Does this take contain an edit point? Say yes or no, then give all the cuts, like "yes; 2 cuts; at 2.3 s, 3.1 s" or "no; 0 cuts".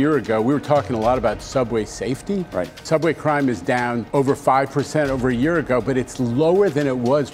yes; 2 cuts; at 2.8 s, 4.0 s